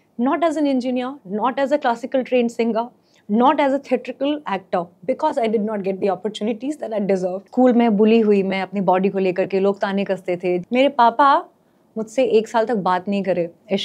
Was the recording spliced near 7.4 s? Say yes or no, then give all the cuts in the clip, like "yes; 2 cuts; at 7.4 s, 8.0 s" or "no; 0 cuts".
yes; 2 cuts; at 7.4 s, 10.6 s